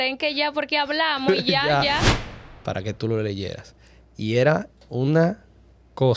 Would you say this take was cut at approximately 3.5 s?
no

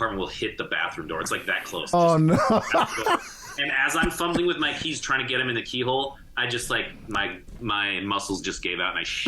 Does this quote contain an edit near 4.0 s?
no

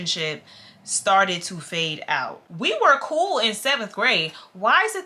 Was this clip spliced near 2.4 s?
yes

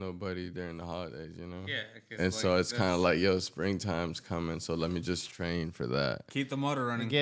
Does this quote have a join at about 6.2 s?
yes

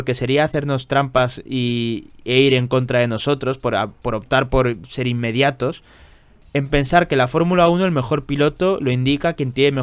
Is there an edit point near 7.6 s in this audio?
no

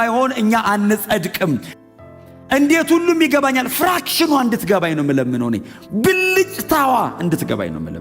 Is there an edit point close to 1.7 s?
yes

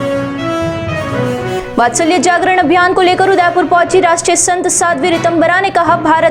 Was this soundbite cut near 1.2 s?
no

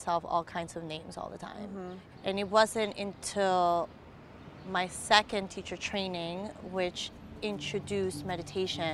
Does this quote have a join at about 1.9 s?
yes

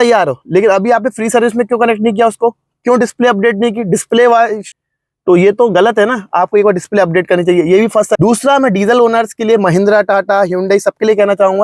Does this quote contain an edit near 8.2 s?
yes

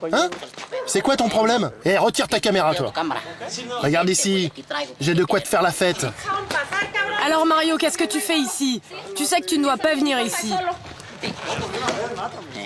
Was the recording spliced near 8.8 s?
no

